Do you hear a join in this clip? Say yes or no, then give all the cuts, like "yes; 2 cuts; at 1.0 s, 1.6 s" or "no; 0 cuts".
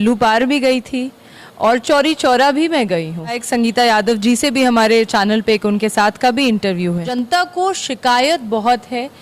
yes; 2 cuts; at 3.4 s, 7.1 s